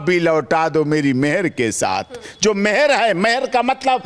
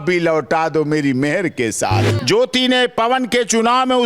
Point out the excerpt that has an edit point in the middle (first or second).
second